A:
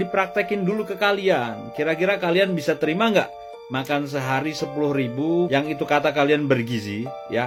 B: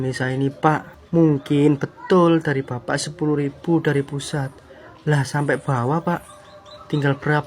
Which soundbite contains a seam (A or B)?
B